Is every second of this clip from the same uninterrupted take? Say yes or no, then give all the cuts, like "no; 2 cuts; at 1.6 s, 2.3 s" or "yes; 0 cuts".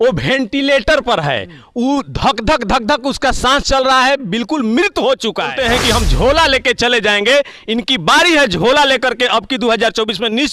no; 1 cut; at 5.6 s